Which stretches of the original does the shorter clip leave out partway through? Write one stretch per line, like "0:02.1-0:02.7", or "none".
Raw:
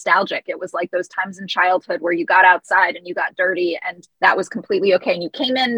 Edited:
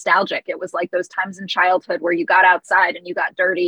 none